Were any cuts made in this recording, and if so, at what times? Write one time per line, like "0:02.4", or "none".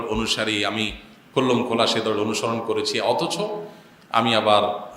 none

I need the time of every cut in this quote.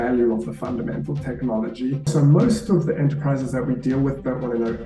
0:02.0

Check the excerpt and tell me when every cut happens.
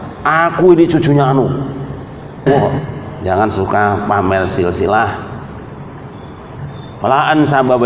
0:02.8

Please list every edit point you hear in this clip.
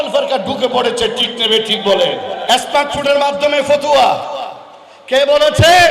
0:02.4

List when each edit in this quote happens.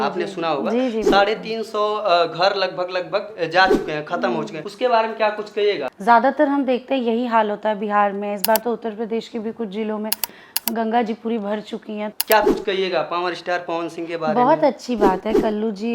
0:04.6
0:05.9
0:12.1

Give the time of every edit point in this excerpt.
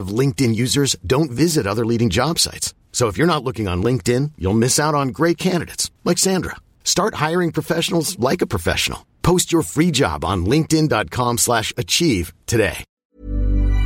0:12.9

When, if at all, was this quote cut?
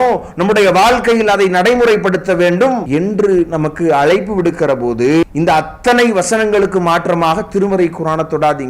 0:02.8
0:05.2

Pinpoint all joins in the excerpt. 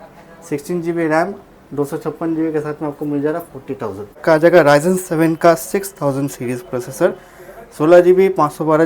0:04.2

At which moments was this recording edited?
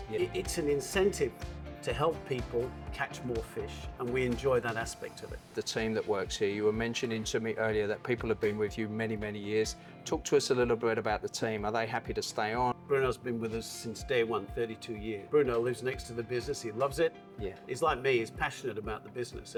none

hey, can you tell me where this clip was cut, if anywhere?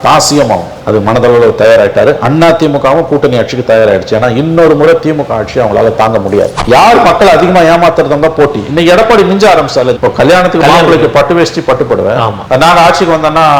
0:06.6

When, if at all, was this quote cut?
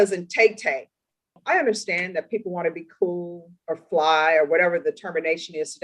0:01.4

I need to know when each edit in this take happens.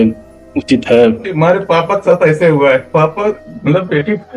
0:01.3
0:02.9

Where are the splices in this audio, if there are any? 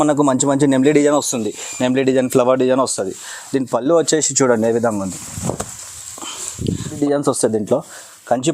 0:06.9

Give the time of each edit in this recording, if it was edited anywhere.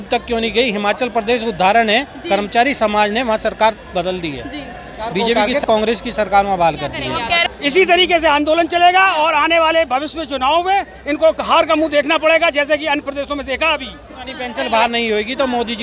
0:05.3
0:07.4
0:14.4

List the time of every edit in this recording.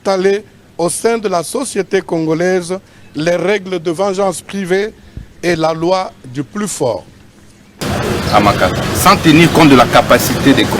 0:07.8

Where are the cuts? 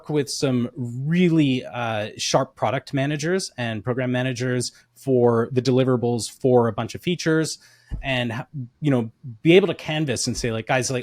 none

